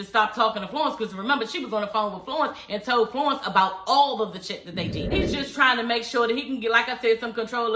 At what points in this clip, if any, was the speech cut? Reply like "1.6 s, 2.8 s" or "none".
5.1 s